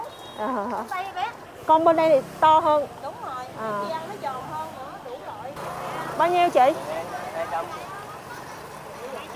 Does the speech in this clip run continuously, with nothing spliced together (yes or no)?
no